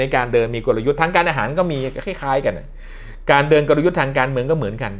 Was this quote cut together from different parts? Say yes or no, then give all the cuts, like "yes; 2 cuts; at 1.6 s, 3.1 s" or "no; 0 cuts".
no; 0 cuts